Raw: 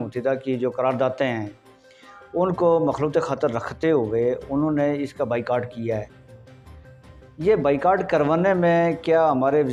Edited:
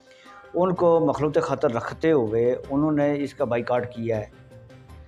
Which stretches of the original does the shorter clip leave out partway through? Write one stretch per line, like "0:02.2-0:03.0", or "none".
none